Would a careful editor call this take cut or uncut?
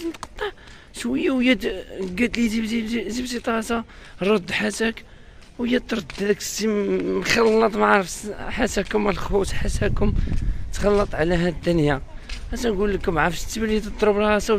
uncut